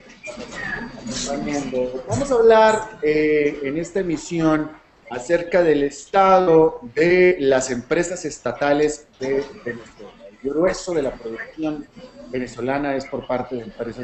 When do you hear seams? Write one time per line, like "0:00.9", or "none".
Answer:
none

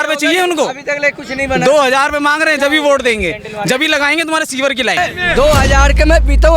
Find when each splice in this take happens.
0:05.0

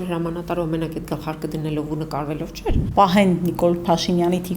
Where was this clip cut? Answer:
0:02.8

